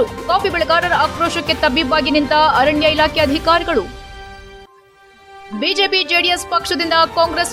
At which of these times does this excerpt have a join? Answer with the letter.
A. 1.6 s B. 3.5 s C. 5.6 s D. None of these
D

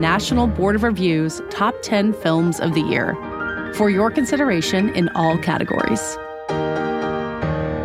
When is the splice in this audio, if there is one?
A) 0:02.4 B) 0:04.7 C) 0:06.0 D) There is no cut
C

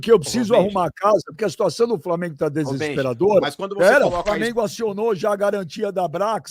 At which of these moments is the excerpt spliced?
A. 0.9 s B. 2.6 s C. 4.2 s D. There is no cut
C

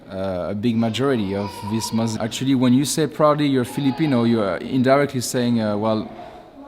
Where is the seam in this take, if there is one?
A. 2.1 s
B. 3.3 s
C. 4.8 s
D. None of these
A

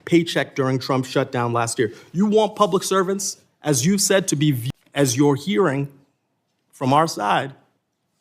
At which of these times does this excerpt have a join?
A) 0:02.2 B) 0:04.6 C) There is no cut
B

